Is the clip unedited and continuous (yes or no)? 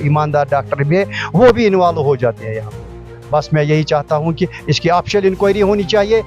yes